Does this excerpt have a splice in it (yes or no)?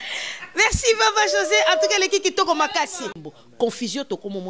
yes